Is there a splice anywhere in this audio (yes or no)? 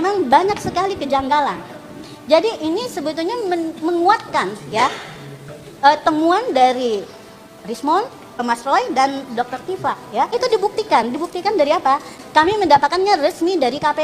yes